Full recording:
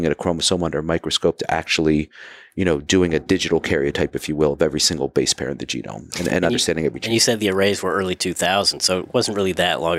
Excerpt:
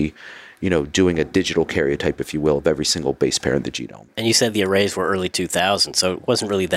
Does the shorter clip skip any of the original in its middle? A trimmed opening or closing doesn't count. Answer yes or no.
yes